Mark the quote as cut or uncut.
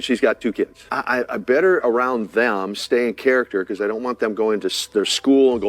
uncut